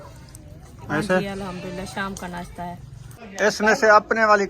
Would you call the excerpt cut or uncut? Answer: cut